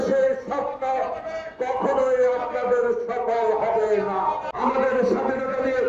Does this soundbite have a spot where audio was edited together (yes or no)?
yes